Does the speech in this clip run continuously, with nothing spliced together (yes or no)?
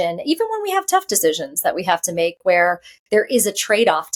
yes